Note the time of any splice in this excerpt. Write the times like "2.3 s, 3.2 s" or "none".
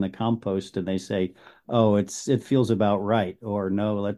none